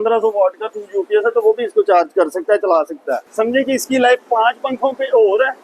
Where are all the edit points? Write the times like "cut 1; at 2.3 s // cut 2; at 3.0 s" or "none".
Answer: cut 1; at 3.2 s